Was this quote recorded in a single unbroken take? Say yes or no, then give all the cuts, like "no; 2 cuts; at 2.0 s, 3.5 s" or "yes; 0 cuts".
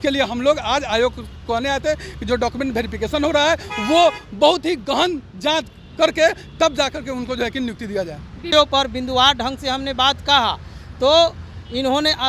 no; 1 cut; at 8.5 s